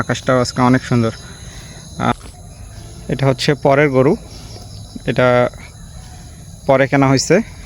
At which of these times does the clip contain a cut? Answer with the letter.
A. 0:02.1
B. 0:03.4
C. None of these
A